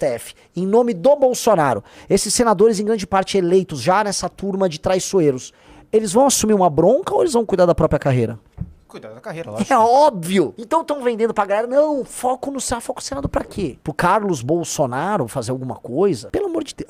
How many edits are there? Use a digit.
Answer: 1